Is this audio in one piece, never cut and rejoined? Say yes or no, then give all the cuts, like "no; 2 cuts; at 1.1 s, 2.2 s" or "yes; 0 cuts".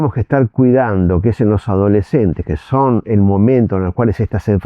yes; 0 cuts